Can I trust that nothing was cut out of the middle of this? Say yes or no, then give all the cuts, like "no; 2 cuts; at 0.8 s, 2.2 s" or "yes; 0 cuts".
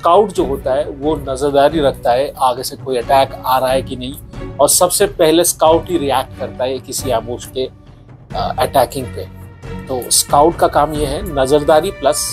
yes; 0 cuts